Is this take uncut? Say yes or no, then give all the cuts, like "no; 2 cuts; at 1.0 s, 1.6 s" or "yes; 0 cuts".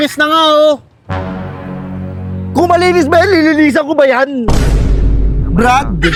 yes; 0 cuts